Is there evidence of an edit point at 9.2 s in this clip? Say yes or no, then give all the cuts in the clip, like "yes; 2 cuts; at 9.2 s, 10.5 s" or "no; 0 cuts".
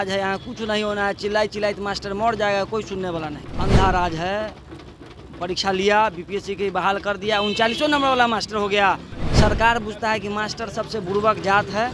yes; 2 cuts; at 3.4 s, 9.2 s